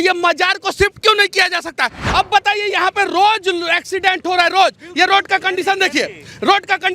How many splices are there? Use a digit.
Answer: 1